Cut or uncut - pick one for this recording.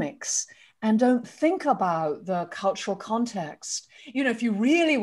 cut